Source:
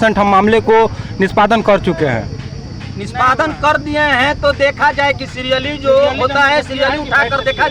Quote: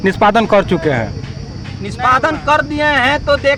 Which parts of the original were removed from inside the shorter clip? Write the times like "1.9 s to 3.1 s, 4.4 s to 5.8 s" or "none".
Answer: none